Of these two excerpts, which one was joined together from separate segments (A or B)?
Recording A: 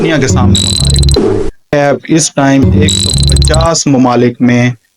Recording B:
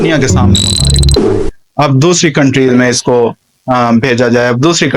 A